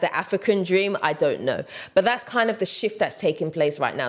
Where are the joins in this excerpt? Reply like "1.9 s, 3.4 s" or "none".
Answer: none